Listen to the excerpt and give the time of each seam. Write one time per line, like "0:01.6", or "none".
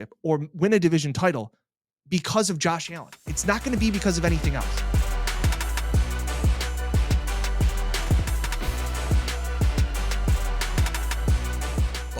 0:04.7